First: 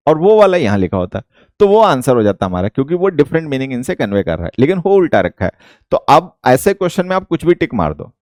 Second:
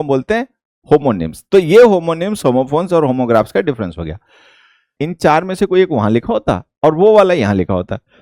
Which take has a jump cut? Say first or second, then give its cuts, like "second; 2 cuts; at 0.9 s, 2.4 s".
second; 1 cut; at 5.0 s